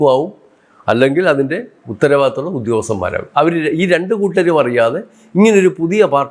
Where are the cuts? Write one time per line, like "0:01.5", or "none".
none